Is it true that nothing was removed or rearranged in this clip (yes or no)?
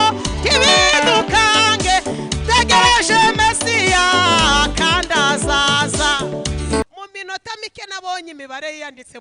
no